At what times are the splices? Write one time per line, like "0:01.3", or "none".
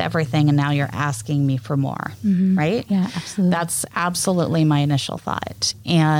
none

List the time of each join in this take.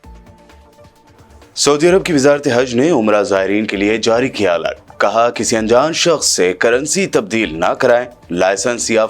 0:00.9

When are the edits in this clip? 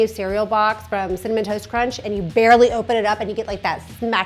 none

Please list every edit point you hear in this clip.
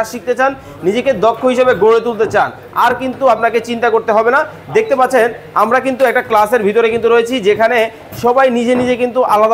none

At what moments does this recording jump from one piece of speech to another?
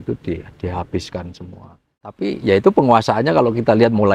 0:02.2

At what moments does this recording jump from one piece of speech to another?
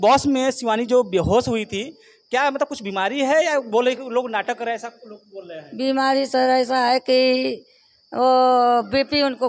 none

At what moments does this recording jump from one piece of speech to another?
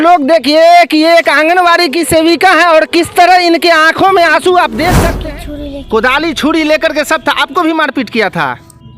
0:05.0

